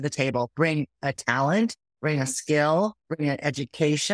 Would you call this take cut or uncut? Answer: cut